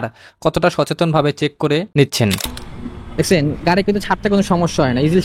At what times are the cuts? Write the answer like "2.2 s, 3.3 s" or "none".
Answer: 2.4 s